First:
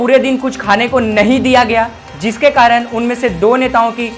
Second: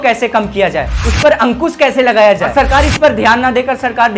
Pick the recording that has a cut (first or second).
second